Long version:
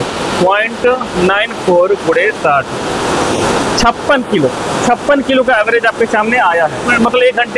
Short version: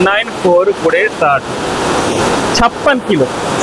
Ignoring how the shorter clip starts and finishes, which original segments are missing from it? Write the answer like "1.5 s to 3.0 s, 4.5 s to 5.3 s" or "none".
none